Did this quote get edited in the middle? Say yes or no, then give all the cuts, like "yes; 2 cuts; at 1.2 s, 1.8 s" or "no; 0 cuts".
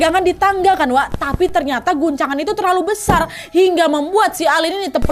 no; 0 cuts